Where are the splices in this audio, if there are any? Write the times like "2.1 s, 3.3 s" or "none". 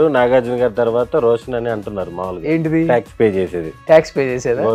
none